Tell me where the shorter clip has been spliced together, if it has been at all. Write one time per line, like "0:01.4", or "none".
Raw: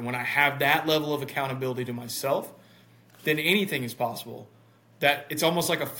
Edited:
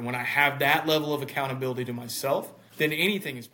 0:02.6